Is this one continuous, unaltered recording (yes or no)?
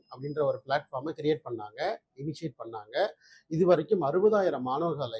yes